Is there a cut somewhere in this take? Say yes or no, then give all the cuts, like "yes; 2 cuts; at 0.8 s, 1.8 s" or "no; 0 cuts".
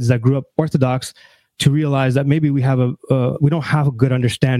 no; 0 cuts